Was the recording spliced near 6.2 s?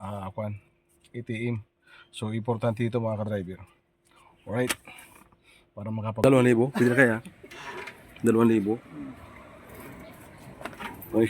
yes; 1 cut; at 6.2 s

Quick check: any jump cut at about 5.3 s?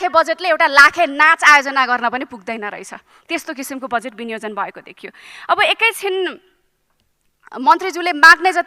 no; 0 cuts

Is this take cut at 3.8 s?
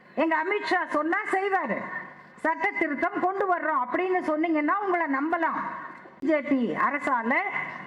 no; 1 cut; at 6.2 s

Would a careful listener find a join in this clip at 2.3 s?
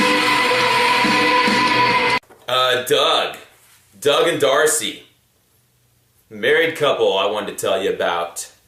yes; 1 cut; at 2.3 s

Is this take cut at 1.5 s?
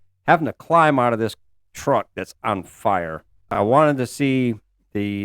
no; 1 cut; at 3.5 s

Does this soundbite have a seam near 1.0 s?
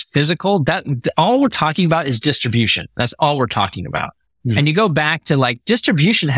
no; 0 cuts

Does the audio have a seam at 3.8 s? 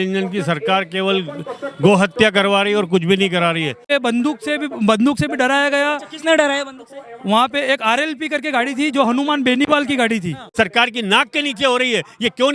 yes; 2 cuts; at 3.8 s, 10.4 s

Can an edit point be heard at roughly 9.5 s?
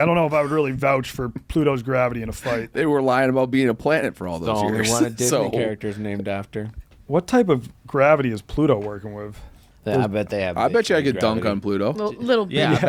no; 0 cuts

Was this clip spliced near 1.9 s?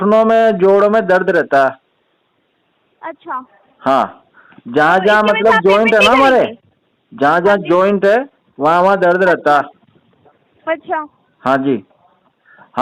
no; 0 cuts

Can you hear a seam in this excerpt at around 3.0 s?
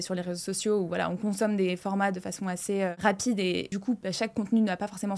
yes; 2 cuts; at 3.0 s, 3.9 s

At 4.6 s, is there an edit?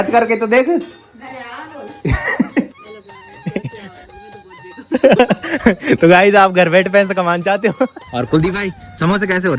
no; 2 cuts; at 2.8 s, 8.0 s

